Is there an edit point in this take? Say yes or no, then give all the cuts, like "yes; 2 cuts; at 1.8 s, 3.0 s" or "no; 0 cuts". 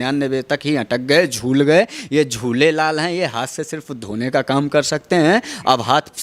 no; 0 cuts